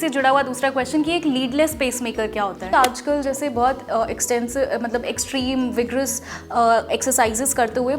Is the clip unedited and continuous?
no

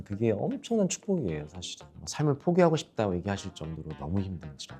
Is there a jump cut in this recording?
yes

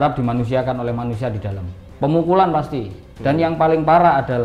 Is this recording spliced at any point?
no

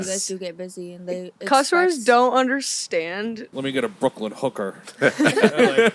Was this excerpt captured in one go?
no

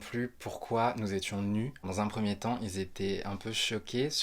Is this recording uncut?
no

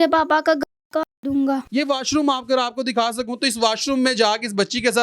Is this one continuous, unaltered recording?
no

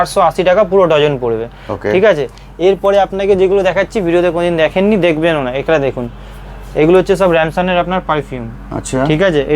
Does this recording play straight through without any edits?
yes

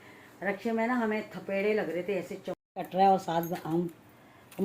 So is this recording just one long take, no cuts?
no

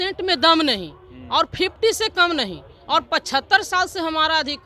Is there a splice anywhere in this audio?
no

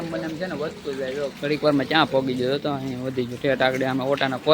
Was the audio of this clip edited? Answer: no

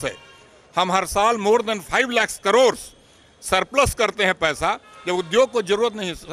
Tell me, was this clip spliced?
no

